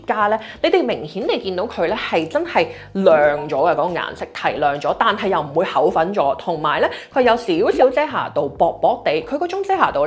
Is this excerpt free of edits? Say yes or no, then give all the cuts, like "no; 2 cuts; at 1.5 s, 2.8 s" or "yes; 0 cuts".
yes; 0 cuts